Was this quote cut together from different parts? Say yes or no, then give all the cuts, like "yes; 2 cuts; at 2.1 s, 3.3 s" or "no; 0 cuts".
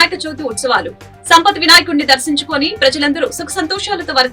no; 0 cuts